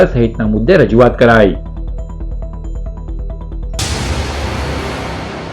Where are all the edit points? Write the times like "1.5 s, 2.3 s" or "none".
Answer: 3.8 s